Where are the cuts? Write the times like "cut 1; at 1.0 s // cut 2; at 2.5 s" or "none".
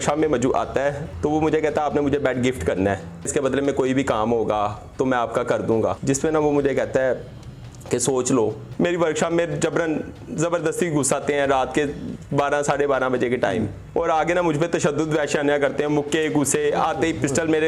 cut 1; at 1.1 s // cut 2; at 3.3 s // cut 3; at 6.0 s // cut 4; at 8.6 s // cut 5; at 13.8 s